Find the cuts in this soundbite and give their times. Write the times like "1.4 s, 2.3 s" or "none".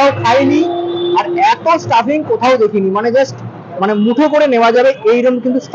none